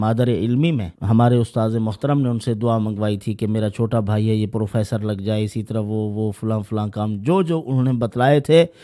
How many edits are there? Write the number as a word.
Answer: one